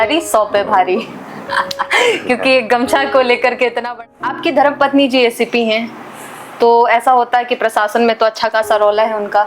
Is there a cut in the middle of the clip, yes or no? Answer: yes